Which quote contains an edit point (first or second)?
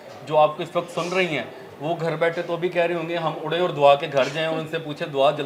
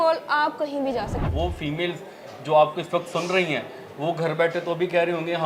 second